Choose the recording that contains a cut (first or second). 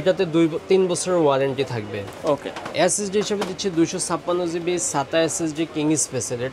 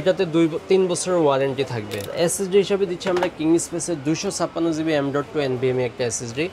second